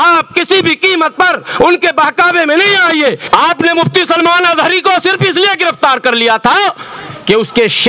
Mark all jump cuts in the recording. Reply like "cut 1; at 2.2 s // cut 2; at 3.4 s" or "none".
cut 1; at 3.2 s